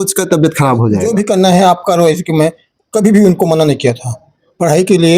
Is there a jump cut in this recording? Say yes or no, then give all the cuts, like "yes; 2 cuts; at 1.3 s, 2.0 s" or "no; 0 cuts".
yes; 1 cut; at 1.1 s